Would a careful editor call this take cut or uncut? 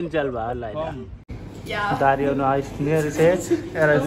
cut